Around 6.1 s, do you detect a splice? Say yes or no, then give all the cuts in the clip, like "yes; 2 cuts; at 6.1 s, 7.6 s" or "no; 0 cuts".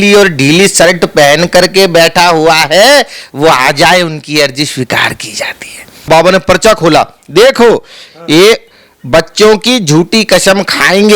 yes; 1 cut; at 6.1 s